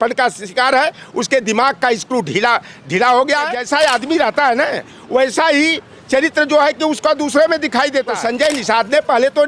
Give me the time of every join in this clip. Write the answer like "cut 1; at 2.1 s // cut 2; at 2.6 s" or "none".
cut 1; at 3.6 s // cut 2; at 8.1 s

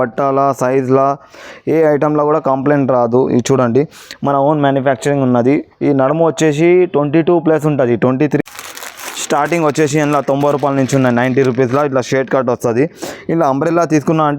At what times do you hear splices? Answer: cut 1; at 8.4 s

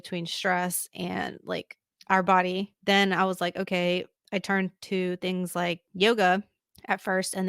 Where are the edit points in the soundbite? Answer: cut 1; at 2.7 s // cut 2; at 4.2 s // cut 3; at 5.9 s

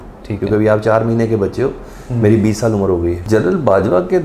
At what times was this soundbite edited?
cut 1; at 3.2 s

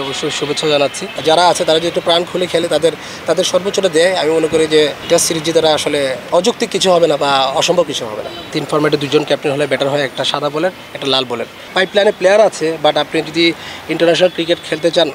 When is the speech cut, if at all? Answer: cut 1; at 1.1 s // cut 2; at 5.0 s // cut 3; at 6.2 s // cut 4; at 8.5 s // cut 5; at 11.7 s

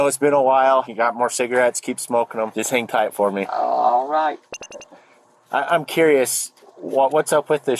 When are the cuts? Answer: cut 1; at 1.0 s // cut 2; at 2.5 s // cut 3; at 3.5 s

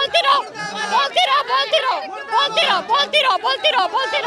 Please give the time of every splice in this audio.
none

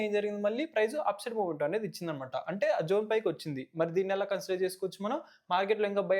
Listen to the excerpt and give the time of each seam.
none

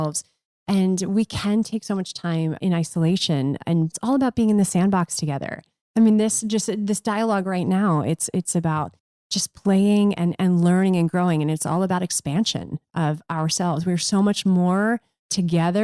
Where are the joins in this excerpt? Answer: cut 1; at 2.6 s // cut 2; at 4.0 s

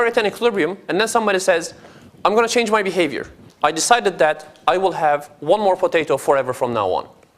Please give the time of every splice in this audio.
cut 1; at 4.5 s

